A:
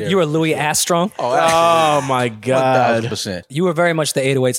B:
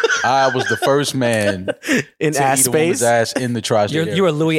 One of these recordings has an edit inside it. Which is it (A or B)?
A